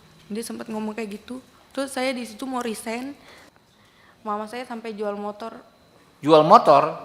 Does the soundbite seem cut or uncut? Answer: cut